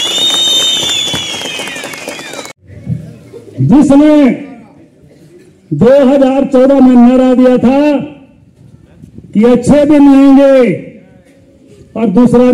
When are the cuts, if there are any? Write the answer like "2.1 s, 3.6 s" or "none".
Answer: 2.5 s